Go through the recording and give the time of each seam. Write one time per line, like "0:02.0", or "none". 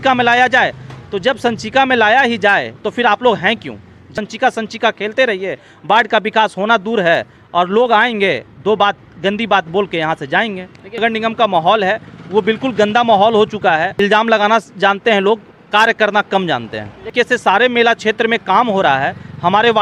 0:04.1
0:11.0
0:14.0
0:17.1